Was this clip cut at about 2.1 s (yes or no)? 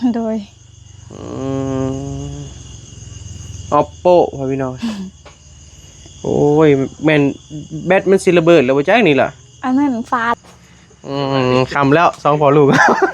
no